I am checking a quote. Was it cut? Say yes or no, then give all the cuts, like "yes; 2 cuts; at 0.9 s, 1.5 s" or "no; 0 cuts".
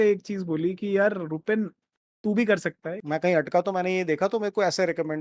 yes; 1 cut; at 2.9 s